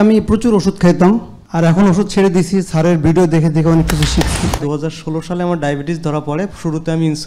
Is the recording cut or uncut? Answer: cut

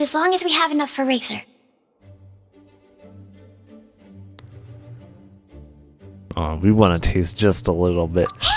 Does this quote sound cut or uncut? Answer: uncut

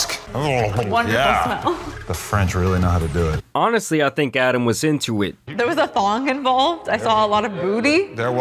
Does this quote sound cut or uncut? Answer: uncut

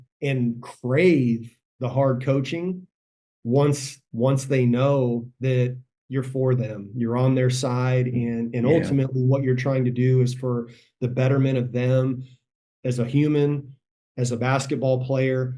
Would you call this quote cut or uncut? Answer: uncut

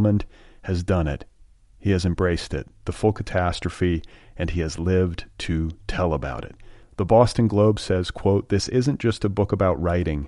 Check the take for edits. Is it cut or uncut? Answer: uncut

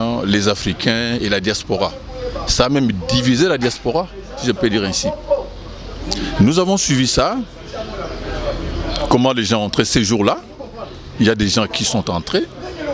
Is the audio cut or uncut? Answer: uncut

